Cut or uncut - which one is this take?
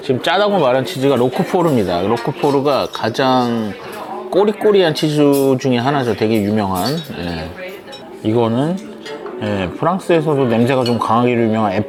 uncut